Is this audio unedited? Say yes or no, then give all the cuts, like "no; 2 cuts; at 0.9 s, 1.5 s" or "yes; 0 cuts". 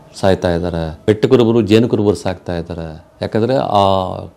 no; 1 cut; at 0.9 s